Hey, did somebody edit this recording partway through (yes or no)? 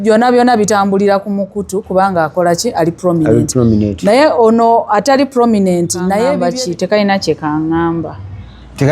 yes